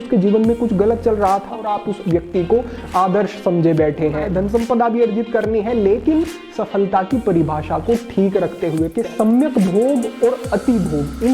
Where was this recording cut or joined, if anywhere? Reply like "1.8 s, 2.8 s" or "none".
1.6 s, 4.3 s, 8.9 s